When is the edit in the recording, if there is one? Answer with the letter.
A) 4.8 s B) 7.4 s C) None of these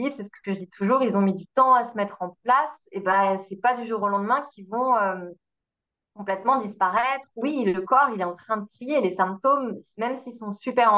B